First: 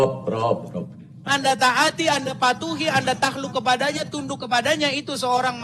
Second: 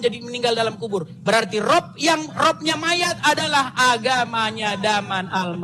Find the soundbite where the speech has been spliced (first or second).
first